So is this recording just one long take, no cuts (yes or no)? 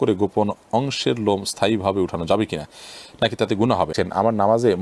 no